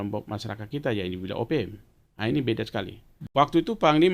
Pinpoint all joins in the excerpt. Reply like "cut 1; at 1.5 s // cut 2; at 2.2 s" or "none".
cut 1; at 3.1 s